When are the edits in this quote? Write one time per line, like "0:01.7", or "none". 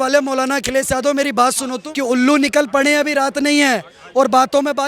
0:01.7